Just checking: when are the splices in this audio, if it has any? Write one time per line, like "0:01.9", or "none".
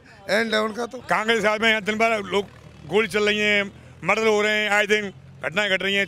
0:01.0